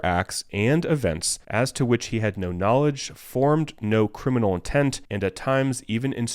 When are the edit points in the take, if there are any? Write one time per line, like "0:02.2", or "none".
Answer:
0:01.3
0:05.1

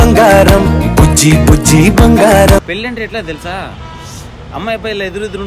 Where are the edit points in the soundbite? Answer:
0:02.6

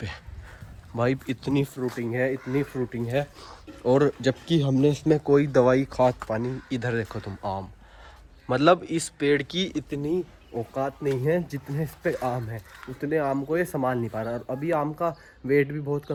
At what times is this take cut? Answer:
none

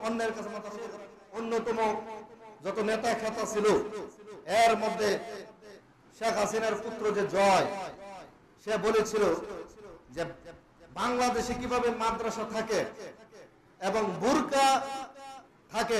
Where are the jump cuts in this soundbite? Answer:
0:01.0

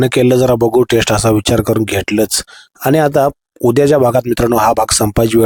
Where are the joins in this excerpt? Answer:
none

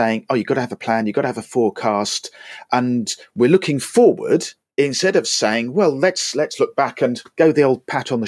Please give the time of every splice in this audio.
0:07.2

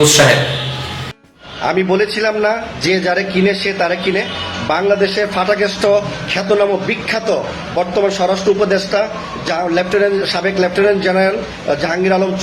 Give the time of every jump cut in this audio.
0:01.1

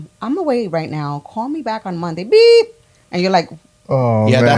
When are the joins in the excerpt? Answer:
none

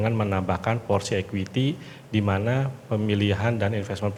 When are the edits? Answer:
none

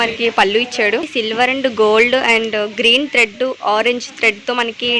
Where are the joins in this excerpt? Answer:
0:01.1

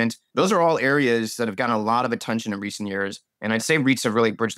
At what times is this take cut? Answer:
none

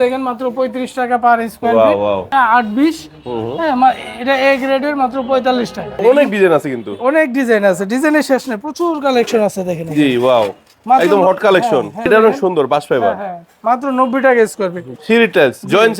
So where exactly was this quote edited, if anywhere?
0:02.3
0:05.9
0:12.0
0:14.9

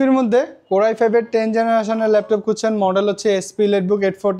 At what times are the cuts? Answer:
none

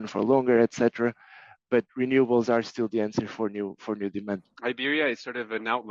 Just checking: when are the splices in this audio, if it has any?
0:04.5

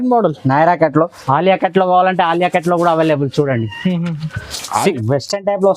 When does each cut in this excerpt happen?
0:01.2
0:04.9

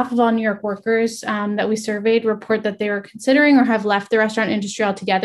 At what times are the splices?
none

